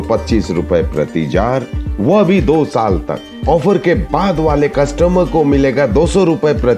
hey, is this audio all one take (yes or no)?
yes